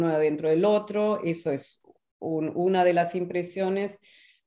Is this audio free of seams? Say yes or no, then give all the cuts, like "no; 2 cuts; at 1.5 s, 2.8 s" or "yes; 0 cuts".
yes; 0 cuts